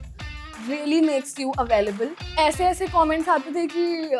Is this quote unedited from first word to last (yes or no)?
no